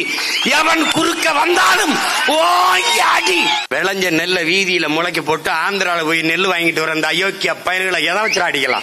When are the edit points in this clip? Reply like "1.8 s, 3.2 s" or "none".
3.6 s